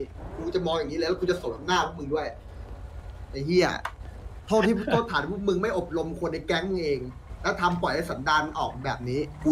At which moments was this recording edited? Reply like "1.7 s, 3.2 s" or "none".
none